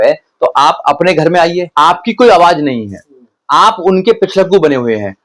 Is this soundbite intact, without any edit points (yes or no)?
no